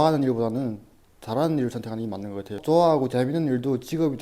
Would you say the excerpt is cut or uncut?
cut